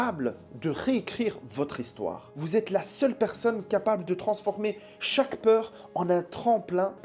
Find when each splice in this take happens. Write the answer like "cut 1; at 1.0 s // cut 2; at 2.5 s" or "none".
none